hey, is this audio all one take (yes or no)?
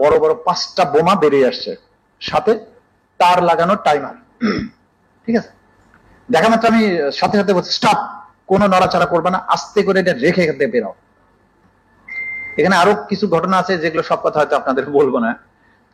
yes